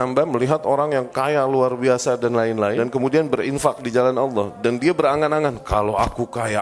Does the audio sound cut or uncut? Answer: cut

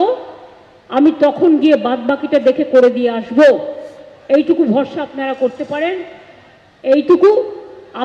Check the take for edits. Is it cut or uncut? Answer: uncut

